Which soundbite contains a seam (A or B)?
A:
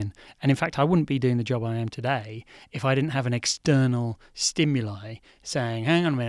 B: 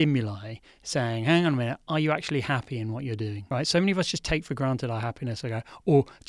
B